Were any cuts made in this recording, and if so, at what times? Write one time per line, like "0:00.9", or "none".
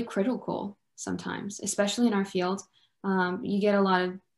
none